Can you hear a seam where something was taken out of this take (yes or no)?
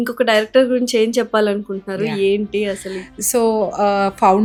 no